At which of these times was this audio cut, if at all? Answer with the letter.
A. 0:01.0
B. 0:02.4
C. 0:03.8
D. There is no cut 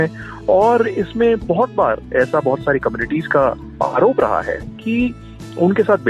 C